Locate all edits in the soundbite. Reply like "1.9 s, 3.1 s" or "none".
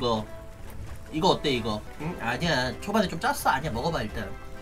1.9 s